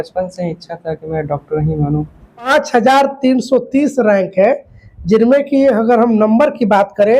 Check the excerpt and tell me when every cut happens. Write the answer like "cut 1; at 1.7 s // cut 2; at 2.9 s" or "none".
cut 1; at 2.5 s